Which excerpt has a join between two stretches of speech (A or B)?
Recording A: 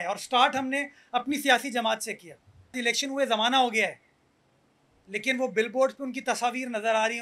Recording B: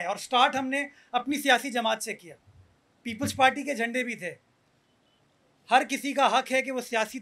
A